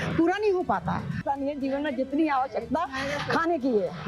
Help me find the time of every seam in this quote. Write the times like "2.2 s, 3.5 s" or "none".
1.2 s